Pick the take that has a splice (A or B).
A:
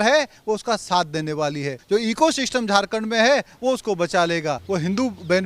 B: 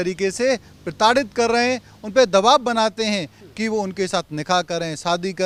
A